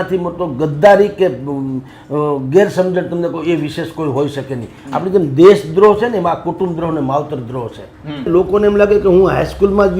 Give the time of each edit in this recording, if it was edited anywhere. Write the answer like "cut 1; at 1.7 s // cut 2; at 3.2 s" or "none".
cut 1; at 8.3 s

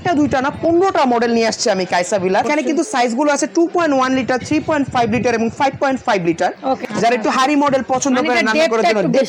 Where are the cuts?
cut 1; at 2.5 s // cut 2; at 6.8 s

